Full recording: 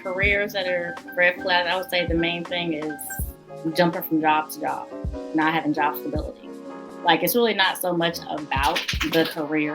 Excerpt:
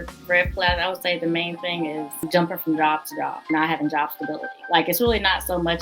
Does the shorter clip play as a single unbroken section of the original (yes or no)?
no